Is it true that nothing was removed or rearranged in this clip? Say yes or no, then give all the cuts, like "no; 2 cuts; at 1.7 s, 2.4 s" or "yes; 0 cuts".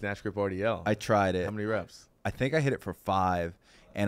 no; 1 cut; at 1.6 s